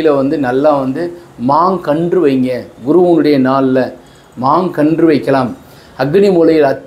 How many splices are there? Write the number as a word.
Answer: zero